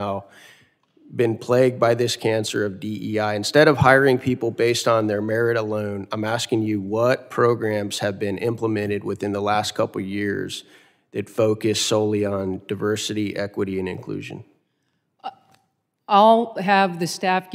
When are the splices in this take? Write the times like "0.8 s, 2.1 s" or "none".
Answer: none

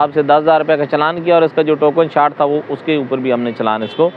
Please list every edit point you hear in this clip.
none

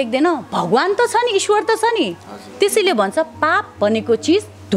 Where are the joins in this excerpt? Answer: none

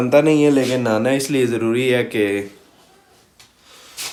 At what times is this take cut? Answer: none

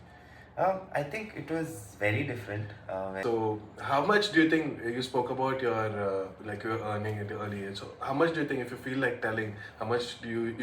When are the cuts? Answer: 3.2 s

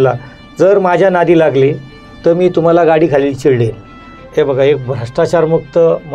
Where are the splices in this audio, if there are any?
4.2 s

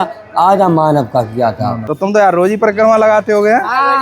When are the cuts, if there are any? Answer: 1.7 s

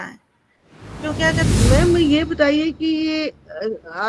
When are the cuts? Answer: 1.4 s

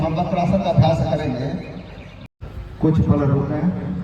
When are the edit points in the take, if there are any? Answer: 2.2 s

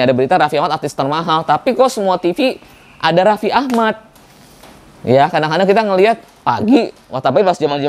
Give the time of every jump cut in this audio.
none

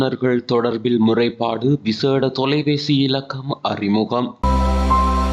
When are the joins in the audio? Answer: none

